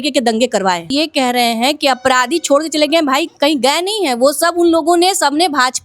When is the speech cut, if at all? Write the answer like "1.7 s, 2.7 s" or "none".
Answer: 0.9 s